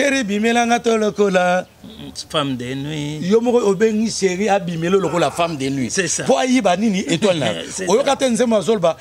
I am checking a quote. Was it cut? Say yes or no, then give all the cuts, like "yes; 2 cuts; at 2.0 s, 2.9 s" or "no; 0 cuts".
no; 0 cuts